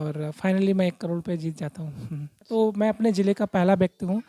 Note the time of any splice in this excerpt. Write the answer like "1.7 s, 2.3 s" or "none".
2.5 s